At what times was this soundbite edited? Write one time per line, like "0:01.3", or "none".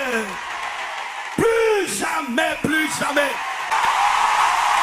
0:03.7

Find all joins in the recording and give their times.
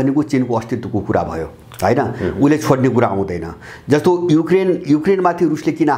none

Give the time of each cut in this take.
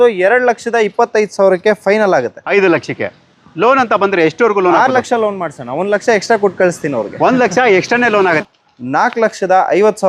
0:02.4
0:08.3

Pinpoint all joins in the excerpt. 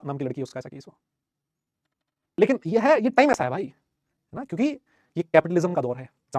0:02.4

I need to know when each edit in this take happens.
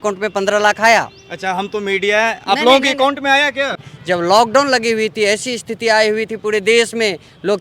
0:03.8

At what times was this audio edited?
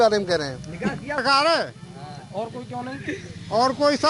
0:01.2

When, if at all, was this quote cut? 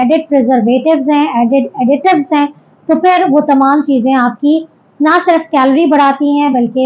none

